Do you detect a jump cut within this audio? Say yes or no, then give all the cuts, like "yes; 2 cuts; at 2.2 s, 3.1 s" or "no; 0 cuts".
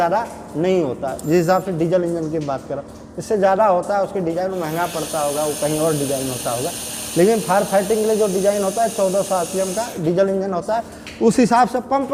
no; 0 cuts